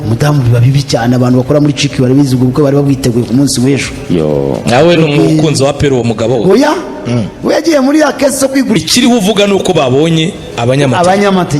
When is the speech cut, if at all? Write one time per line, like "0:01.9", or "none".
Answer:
0:08.8

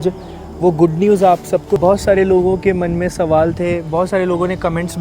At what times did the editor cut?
0:01.8

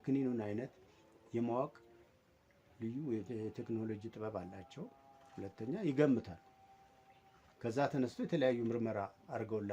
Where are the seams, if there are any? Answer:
none

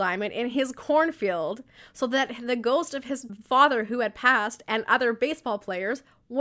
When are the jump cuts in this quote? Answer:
none

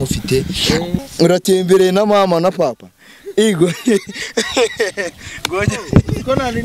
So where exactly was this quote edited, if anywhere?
0:01.0

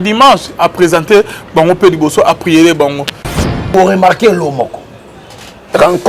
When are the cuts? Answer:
0:03.7

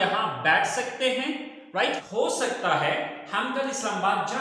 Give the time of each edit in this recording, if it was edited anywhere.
0:02.0

